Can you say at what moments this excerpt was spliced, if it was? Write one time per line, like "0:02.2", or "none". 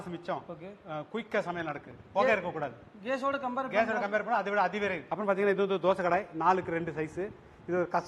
0:01.9
0:05.0

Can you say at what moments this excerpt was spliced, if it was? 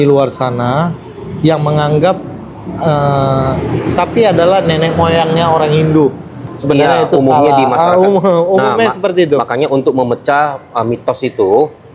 none

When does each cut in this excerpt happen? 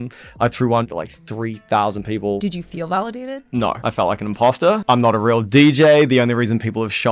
0:00.9
0:02.4
0:03.8
0:04.8

